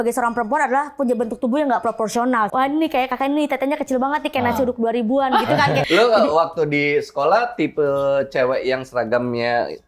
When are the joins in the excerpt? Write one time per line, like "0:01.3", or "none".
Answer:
0:02.5
0:05.8